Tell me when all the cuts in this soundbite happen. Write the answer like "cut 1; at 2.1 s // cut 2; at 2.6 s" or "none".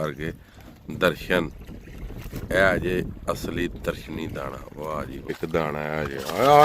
cut 1; at 5.3 s